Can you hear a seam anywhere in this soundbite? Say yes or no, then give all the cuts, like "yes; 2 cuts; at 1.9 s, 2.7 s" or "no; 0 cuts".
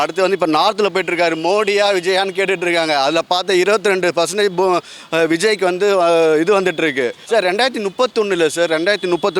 no; 0 cuts